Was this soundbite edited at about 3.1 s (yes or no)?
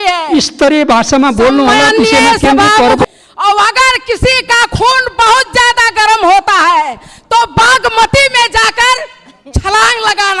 yes